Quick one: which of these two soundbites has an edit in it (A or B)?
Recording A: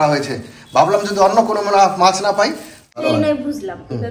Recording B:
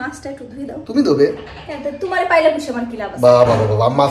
A